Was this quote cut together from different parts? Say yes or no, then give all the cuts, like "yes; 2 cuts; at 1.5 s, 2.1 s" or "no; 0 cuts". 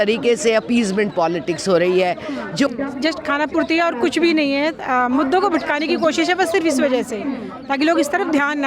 yes; 1 cut; at 2.7 s